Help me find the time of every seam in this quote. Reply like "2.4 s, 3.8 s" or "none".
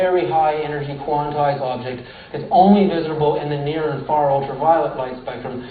2.8 s